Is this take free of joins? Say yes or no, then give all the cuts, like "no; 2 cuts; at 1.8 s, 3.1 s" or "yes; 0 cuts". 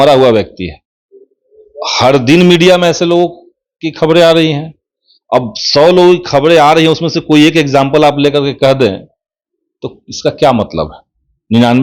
yes; 0 cuts